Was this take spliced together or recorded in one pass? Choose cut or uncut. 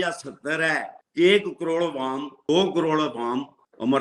cut